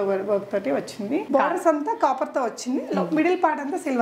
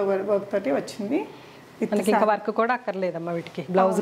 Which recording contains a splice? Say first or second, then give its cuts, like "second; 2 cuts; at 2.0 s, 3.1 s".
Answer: first; 1 cut; at 1.2 s